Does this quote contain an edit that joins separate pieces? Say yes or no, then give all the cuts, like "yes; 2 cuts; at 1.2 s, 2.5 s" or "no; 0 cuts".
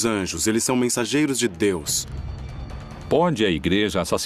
no; 0 cuts